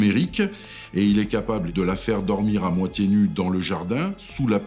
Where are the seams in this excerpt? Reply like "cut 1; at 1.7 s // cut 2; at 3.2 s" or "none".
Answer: cut 1; at 1.7 s